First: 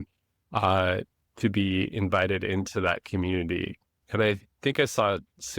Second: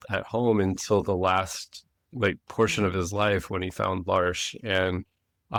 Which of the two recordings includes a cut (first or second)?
first